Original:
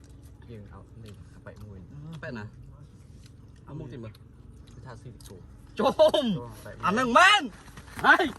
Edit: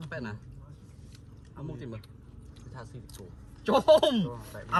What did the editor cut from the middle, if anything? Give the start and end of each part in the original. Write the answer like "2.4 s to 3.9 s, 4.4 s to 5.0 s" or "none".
none